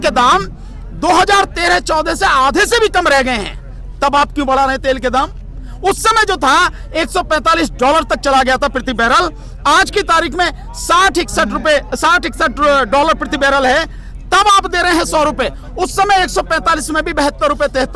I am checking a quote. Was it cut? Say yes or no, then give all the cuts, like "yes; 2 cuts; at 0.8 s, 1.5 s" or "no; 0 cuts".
no; 0 cuts